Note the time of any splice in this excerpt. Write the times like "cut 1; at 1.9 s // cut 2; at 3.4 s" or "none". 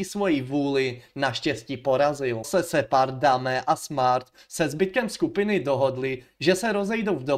cut 1; at 2.5 s